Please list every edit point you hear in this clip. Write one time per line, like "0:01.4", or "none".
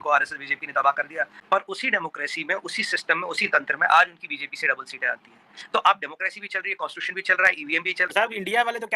0:01.4
0:08.1